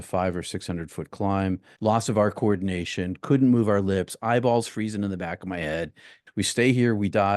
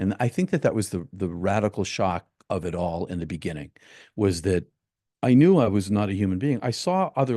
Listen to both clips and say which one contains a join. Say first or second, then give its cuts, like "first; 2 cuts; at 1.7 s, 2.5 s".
first; 2 cuts; at 1.7 s, 6.2 s